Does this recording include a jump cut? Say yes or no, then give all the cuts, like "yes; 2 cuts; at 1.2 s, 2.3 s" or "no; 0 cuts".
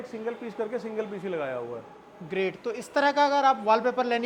no; 0 cuts